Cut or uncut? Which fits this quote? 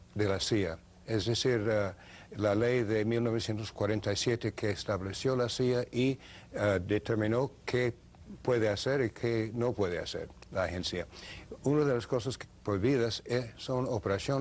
cut